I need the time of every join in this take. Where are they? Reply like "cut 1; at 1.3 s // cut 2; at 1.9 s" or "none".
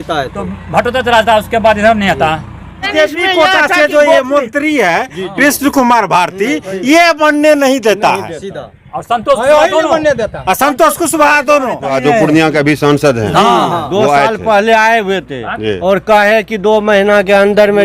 cut 1; at 2.8 s // cut 2; at 11.9 s